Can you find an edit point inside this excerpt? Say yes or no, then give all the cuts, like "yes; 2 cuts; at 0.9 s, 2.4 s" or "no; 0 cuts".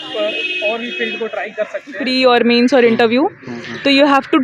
yes; 1 cut; at 2.1 s